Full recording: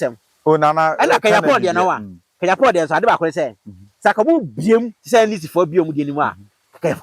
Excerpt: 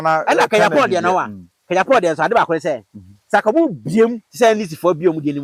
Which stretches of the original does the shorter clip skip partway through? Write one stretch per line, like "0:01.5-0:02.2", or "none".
none